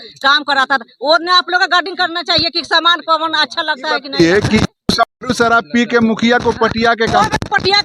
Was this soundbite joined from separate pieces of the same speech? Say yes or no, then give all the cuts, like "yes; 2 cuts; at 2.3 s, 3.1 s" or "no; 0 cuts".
yes; 1 cut; at 4.0 s